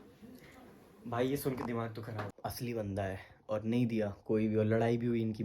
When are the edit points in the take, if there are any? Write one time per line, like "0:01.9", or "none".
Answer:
0:02.3